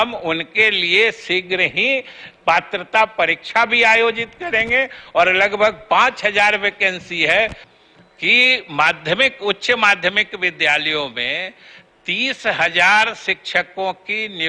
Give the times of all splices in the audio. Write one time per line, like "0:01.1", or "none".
0:07.7